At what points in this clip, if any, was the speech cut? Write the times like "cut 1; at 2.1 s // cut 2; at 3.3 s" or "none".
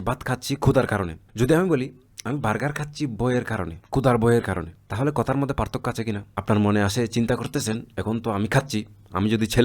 cut 1; at 1.2 s // cut 2; at 3.8 s // cut 3; at 4.8 s // cut 4; at 6.3 s